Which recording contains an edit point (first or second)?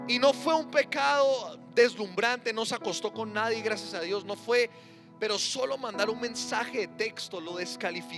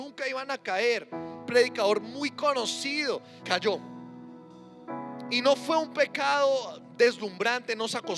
second